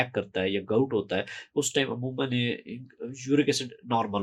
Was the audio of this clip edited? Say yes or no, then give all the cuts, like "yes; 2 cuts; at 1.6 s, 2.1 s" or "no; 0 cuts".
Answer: no; 0 cuts